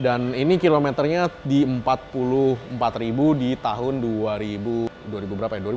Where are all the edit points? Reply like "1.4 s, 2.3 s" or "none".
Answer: 4.9 s